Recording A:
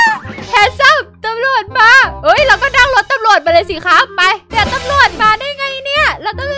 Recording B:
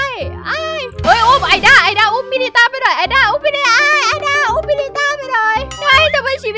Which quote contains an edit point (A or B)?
A